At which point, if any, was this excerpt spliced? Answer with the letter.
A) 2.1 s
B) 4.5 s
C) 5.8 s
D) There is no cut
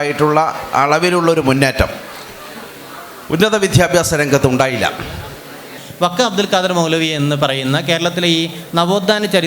C